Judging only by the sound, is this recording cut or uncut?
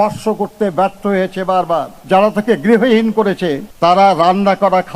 cut